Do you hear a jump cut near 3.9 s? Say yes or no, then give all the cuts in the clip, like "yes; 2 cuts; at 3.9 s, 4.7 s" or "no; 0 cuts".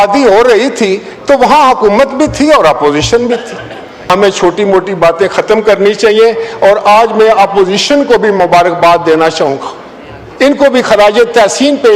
yes; 1 cut; at 3.9 s